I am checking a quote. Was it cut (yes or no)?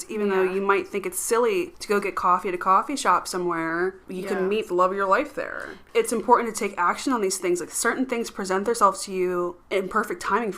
yes